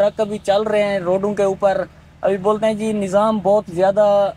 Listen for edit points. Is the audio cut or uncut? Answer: uncut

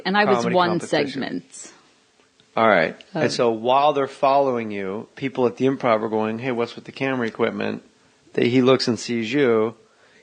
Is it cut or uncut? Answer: cut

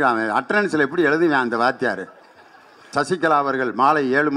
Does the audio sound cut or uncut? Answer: cut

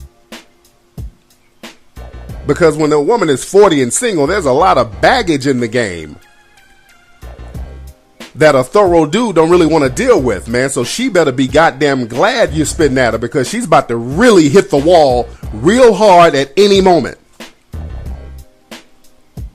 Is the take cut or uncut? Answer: cut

